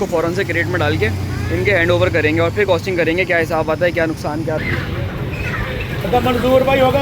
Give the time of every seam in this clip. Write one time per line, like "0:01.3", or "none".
0:04.6